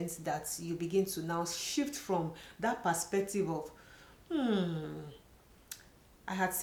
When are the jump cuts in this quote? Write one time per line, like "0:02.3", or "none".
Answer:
none